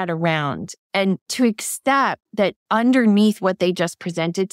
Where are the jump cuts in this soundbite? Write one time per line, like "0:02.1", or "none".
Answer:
0:01.3